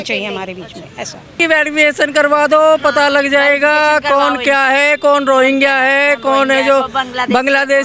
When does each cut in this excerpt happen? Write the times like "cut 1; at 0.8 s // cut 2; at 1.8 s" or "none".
cut 1; at 1.3 s

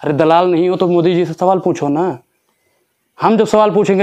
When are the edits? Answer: none

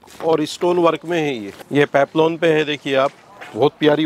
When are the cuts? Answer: cut 1; at 1.5 s

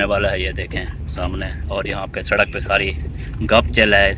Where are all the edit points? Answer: none

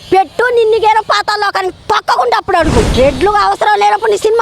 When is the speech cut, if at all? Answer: cut 1; at 2.9 s

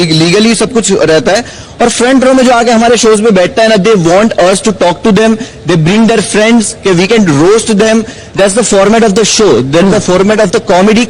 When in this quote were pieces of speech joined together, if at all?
none

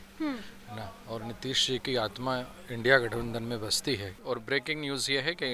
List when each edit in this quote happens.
cut 1; at 4.2 s

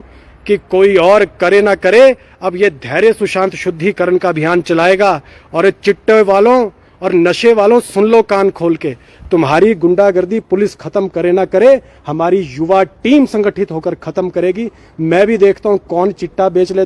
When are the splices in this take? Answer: none

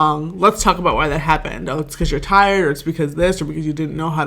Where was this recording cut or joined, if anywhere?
none

